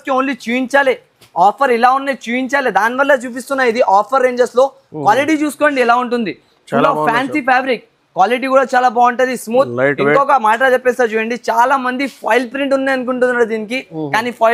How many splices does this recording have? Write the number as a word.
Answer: zero